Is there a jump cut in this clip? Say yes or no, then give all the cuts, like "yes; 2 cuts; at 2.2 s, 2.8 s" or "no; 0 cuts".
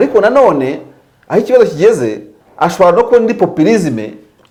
no; 0 cuts